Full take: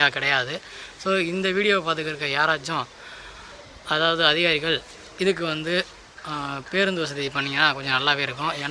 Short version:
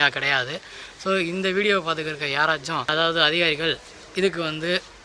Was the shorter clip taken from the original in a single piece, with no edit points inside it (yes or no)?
no